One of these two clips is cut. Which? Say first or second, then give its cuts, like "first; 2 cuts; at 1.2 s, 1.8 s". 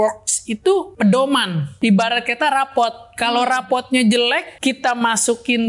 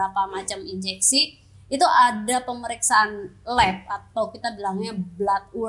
first; 3 cuts; at 0.9 s, 1.7 s, 4.5 s